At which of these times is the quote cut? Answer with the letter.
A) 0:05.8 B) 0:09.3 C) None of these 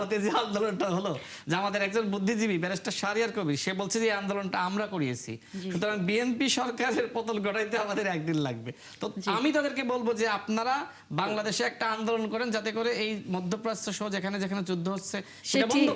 C